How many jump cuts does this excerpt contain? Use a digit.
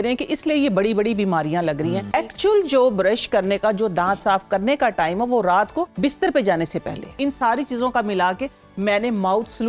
3